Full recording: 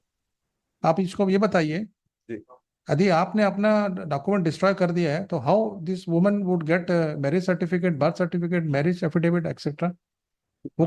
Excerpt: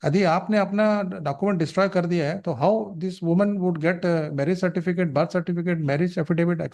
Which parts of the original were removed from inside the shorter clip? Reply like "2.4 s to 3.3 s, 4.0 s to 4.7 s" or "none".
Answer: none